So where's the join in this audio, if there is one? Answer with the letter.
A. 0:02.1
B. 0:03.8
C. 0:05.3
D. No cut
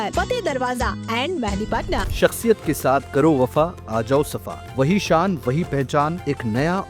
A